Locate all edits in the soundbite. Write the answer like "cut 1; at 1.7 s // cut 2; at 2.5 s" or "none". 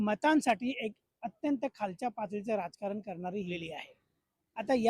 cut 1; at 3.6 s